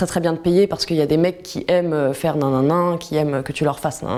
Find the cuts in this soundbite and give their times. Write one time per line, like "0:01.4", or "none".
none